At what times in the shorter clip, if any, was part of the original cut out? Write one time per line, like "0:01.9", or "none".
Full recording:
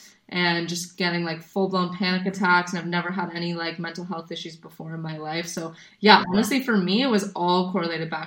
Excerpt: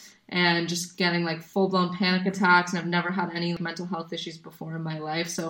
0:03.6